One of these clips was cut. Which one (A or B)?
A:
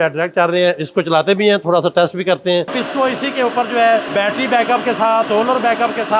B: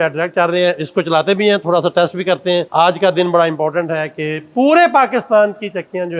A